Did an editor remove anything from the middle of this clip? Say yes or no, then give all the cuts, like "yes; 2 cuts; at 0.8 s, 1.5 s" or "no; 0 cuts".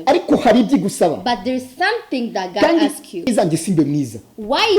yes; 1 cut; at 3.3 s